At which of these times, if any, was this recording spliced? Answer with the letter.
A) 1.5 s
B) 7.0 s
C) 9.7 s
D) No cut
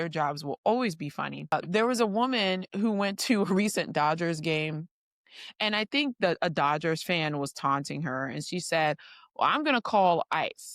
A